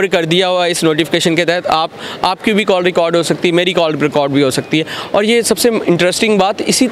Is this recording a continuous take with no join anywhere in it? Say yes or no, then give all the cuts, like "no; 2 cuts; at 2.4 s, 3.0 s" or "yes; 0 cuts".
yes; 0 cuts